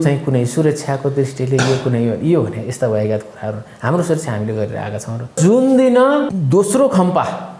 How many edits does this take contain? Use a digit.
2